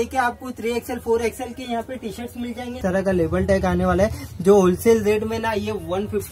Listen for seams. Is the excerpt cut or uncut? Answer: cut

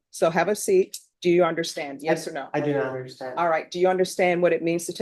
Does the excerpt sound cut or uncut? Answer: cut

